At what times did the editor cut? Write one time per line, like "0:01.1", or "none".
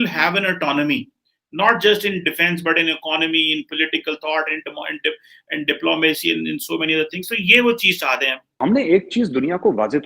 0:08.6